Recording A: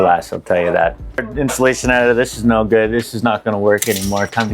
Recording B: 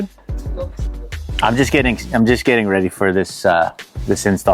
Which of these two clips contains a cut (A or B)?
A